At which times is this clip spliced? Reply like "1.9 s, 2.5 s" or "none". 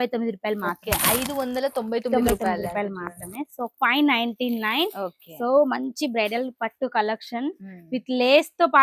none